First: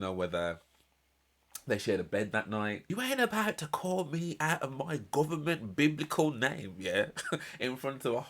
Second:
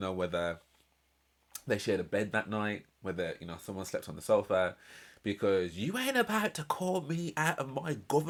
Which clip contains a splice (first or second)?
first